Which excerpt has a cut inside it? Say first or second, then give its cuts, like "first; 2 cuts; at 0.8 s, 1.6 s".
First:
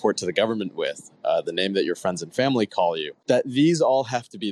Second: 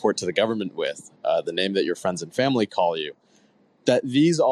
first; 1 cut; at 3.1 s